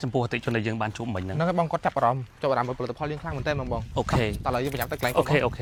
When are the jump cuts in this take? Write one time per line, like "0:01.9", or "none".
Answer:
none

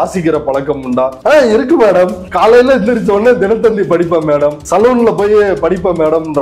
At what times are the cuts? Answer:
0:01.2
0:02.2
0:04.6

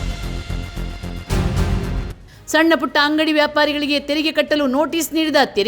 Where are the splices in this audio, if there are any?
0:02.2

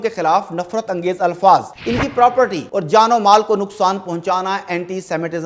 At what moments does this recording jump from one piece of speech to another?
0:02.3

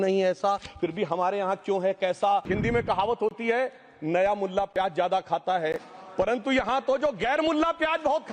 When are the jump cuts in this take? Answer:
0:02.5

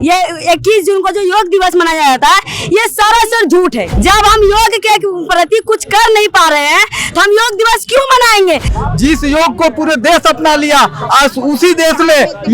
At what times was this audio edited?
0:03.9
0:08.8

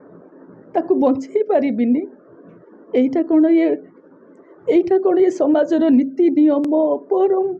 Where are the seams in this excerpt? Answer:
0:06.7

